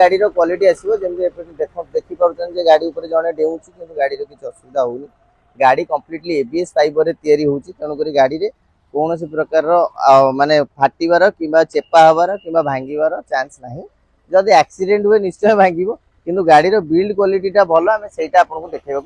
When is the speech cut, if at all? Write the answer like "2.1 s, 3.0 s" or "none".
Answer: none